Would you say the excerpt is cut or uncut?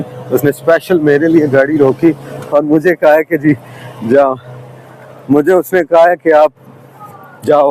uncut